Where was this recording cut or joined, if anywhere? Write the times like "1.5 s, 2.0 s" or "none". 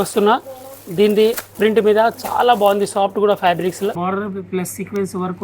1.5 s, 4.0 s